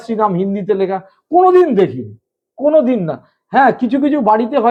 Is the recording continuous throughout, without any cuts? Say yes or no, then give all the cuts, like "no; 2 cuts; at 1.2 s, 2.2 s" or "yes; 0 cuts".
yes; 0 cuts